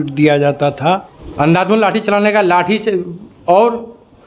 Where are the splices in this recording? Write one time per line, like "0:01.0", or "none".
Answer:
0:01.2

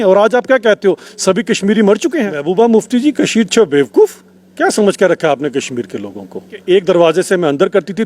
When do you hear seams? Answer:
0:02.4
0:06.6

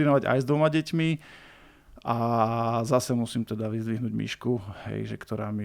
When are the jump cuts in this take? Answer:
none

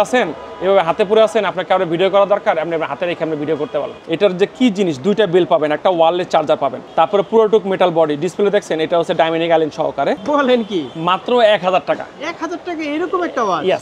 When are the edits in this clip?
0:04.0
0:06.8
0:10.2

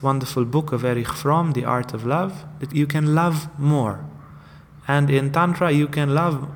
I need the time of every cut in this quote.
0:02.6

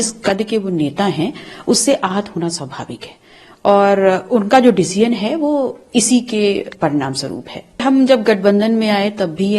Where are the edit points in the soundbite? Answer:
0:07.8

